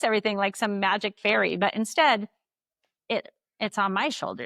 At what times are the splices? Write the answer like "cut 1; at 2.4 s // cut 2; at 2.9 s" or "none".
none